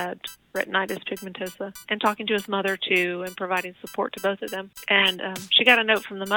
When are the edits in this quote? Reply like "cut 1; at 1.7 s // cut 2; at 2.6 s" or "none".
cut 1; at 1.8 s // cut 2; at 4.7 s